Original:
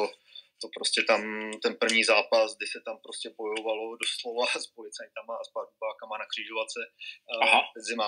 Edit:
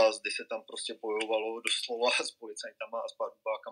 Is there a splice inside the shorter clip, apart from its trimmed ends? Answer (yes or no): no